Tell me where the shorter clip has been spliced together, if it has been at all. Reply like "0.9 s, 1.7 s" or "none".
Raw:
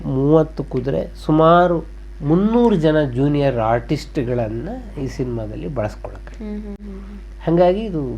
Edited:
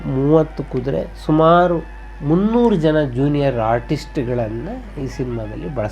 none